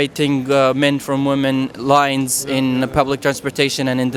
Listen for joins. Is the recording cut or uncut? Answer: uncut